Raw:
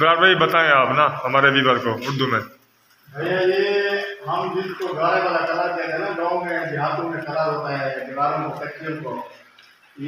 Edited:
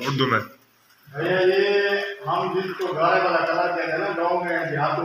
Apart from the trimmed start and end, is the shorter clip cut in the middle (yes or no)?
no